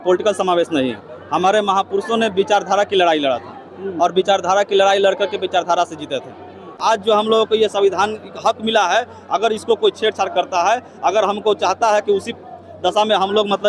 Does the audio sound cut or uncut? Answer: cut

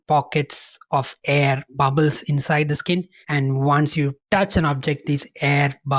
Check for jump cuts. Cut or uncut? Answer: uncut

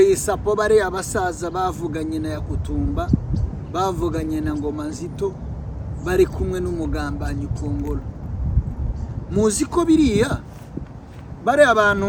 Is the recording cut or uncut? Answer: uncut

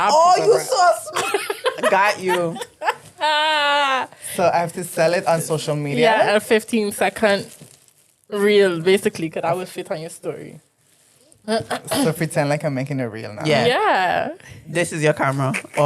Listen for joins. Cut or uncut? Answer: uncut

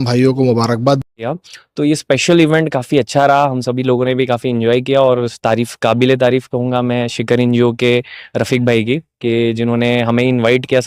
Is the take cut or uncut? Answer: cut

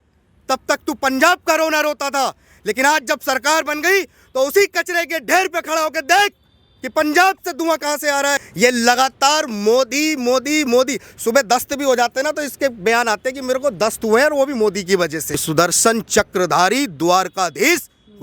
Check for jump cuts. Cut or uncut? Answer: cut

